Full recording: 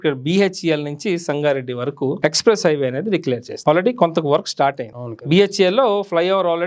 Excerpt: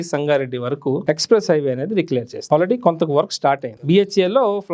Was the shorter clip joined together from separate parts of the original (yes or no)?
yes